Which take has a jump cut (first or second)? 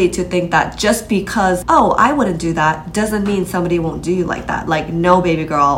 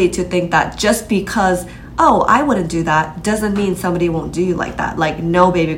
first